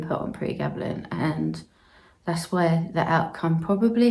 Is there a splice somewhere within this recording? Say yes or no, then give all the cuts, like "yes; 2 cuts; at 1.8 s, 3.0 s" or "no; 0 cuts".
no; 0 cuts